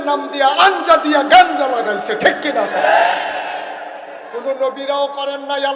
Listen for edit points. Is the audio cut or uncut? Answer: cut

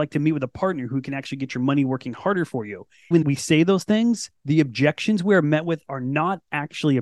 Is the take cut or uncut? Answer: cut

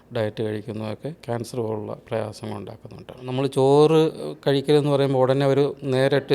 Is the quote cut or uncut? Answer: cut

